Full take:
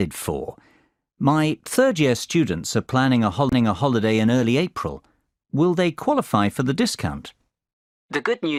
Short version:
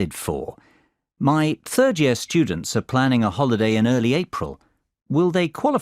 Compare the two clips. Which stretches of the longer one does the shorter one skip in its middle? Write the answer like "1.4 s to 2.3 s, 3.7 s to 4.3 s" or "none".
3.3 s to 3.7 s

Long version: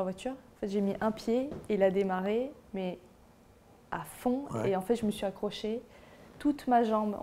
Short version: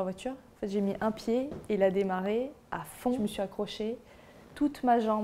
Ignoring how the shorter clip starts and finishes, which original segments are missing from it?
3.2 s to 5.0 s

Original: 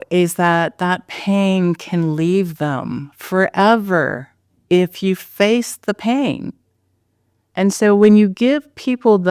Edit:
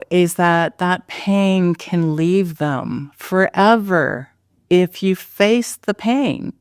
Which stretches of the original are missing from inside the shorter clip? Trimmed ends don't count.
none

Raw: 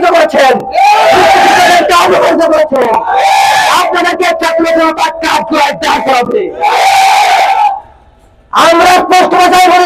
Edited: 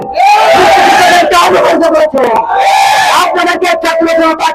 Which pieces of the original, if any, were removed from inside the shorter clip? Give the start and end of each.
none

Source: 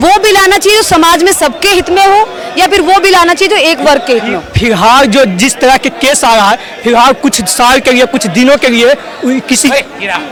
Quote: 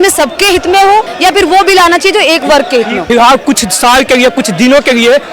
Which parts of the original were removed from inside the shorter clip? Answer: 2.3 s to 2.5 s, 4.3 s to 6.7 s

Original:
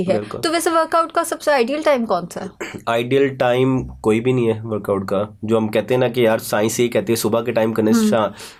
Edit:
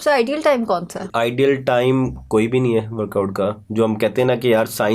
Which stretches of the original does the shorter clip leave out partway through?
2.4 s to 2.7 s

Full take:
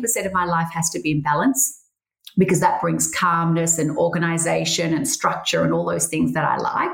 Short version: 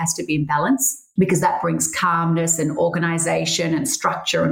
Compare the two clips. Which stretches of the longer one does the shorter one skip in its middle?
1.7 s to 2.2 s

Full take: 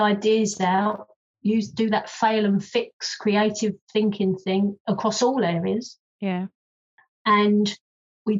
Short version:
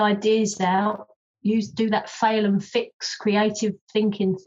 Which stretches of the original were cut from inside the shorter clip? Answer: none

